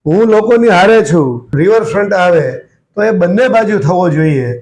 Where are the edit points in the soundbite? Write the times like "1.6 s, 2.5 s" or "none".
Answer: 1.5 s